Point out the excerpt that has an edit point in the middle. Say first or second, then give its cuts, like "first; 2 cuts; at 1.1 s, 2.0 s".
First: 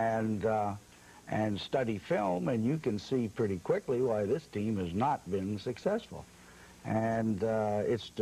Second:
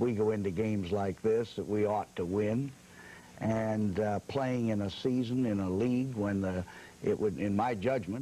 first; 1 cut; at 2.8 s